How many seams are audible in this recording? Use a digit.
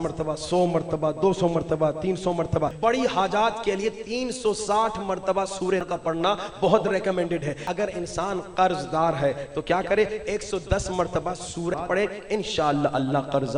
4